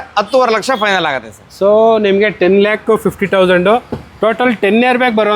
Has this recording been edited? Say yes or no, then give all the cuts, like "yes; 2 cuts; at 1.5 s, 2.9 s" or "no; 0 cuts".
no; 0 cuts